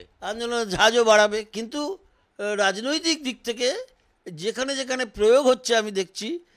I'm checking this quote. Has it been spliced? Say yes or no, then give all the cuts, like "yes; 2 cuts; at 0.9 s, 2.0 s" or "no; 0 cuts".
no; 0 cuts